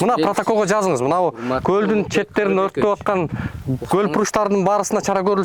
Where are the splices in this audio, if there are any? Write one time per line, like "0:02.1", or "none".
none